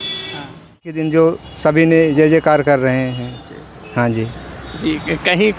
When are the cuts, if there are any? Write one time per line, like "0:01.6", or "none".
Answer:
0:01.0